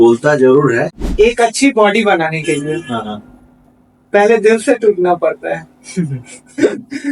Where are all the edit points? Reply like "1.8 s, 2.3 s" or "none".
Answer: 1.0 s